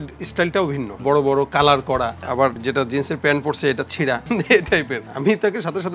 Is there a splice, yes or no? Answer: yes